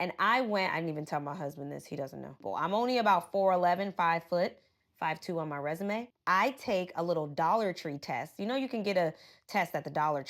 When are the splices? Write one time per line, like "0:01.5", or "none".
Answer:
0:02.4
0:06.1

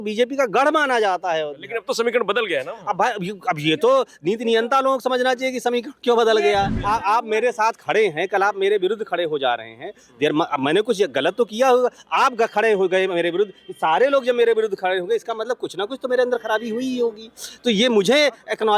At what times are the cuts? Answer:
0:06.8

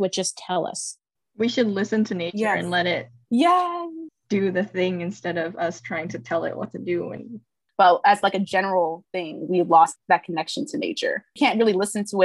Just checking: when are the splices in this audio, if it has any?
0:07.6
0:09.9
0:11.4

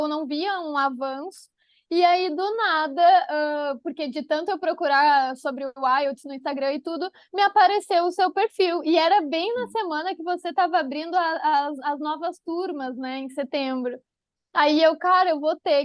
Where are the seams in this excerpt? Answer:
none

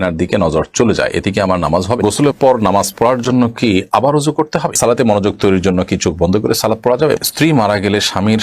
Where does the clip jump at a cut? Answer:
0:02.0
0:04.8
0:07.2

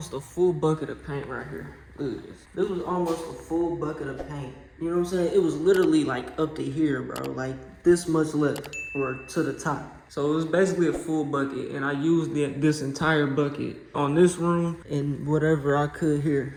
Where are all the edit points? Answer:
none

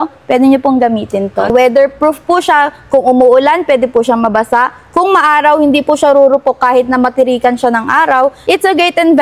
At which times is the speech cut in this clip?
0:01.4
0:08.4

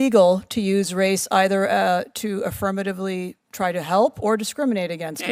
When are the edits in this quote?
none

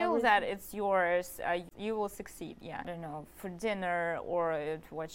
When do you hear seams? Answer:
0:01.7
0:02.9

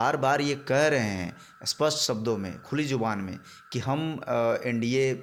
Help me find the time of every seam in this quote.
none

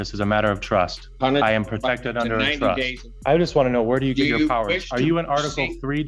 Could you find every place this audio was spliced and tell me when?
0:03.1

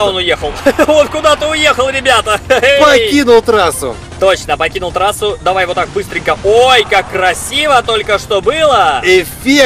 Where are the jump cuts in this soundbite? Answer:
none

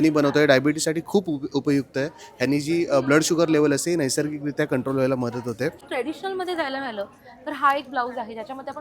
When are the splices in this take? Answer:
0:05.9

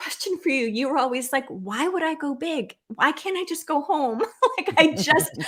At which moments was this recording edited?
none

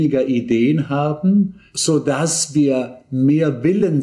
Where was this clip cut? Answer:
0:01.7

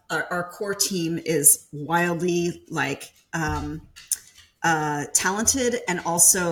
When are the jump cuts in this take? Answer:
none

